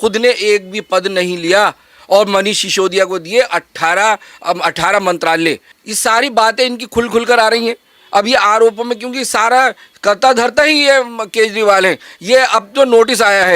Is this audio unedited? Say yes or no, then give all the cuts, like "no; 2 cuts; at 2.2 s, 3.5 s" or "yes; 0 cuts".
no; 1 cut; at 5.7 s